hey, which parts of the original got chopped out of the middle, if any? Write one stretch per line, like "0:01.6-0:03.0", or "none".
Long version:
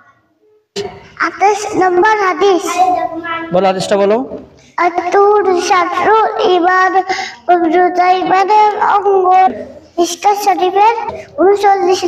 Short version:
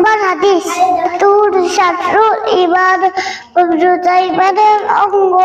0:03.1-0:05.0

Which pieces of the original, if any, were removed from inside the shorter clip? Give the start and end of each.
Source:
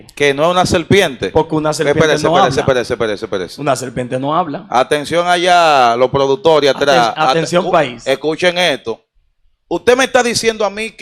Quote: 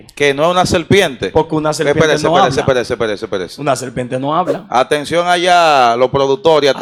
none

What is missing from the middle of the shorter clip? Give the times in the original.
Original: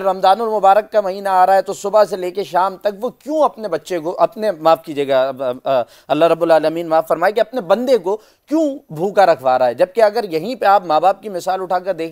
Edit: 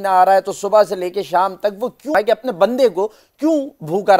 0:03.3-0:07.2

